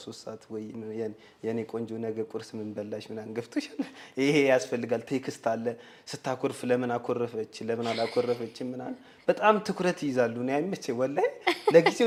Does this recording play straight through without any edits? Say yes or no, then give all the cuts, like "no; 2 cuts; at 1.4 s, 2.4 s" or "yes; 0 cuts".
yes; 0 cuts